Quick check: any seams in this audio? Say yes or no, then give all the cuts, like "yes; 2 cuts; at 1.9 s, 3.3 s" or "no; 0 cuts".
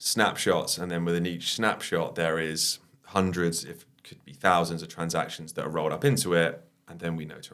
no; 0 cuts